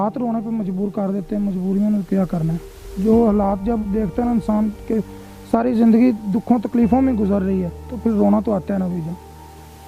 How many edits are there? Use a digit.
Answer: 0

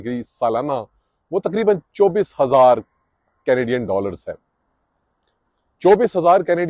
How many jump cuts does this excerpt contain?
0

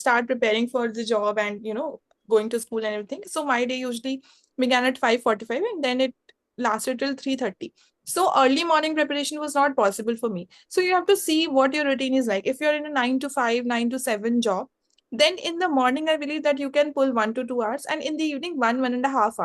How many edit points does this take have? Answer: 0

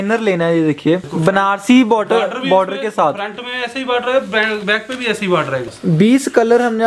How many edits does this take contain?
2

